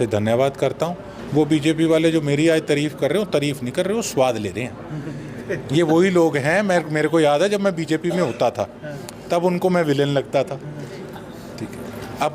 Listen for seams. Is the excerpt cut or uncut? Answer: cut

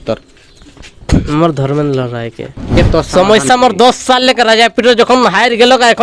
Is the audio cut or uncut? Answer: cut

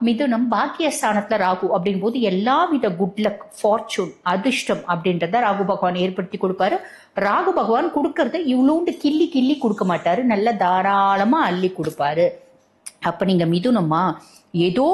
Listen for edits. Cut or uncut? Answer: uncut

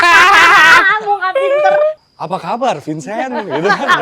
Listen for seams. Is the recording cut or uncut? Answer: cut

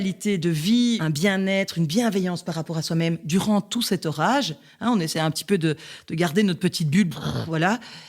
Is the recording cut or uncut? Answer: cut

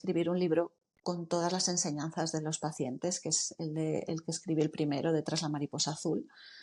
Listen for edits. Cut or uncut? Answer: uncut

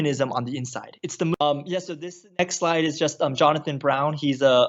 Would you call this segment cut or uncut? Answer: cut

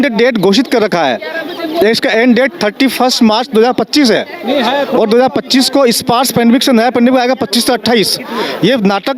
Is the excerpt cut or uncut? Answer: uncut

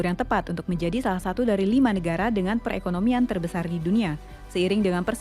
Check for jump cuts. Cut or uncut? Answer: uncut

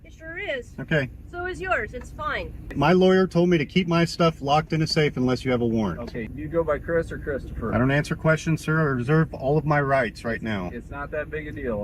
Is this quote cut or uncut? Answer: cut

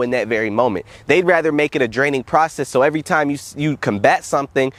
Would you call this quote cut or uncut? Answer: uncut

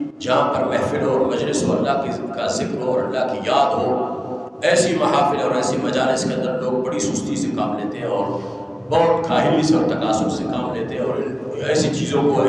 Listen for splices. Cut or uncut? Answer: uncut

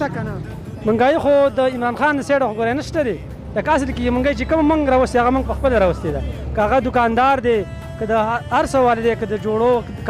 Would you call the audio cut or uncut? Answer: uncut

